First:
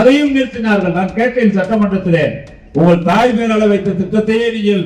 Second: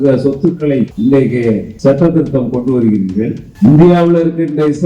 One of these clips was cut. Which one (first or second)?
second